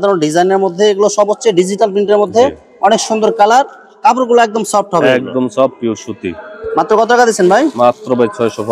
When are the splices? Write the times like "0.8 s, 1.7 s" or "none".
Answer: none